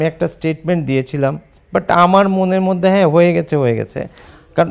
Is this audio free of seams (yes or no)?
no